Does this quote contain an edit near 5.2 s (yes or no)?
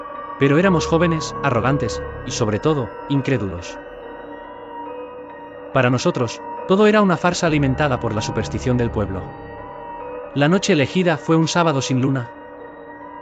yes